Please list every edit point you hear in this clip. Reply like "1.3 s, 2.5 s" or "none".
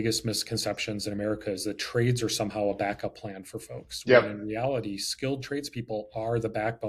none